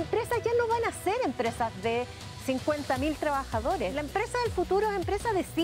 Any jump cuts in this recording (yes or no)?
yes